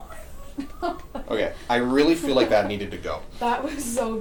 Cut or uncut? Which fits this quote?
uncut